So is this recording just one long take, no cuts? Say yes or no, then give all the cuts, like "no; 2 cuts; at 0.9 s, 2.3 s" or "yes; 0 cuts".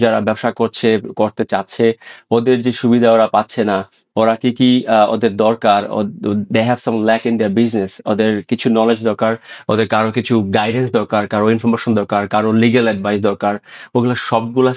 yes; 0 cuts